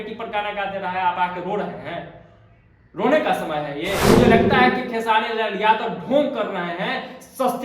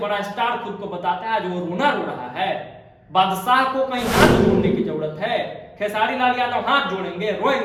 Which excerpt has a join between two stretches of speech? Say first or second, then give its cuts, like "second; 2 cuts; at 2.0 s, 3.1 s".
first; 1 cut; at 4.0 s